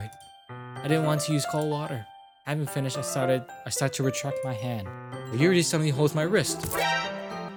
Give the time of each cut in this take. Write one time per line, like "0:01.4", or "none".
none